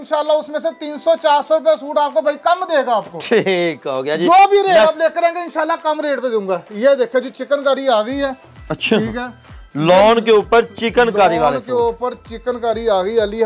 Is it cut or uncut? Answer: uncut